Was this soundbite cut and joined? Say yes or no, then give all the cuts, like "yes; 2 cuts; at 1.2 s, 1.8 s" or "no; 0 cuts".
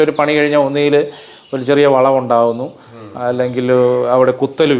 no; 0 cuts